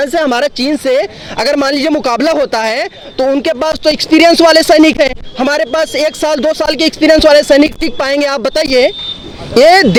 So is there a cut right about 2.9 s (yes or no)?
no